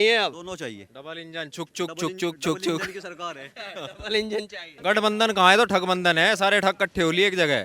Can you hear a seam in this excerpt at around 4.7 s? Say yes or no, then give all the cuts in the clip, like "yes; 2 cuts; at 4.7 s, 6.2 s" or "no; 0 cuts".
yes; 1 cut; at 4.7 s